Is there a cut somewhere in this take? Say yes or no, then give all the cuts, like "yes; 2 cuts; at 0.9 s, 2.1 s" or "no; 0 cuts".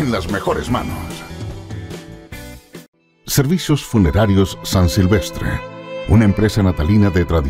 yes; 1 cut; at 2.9 s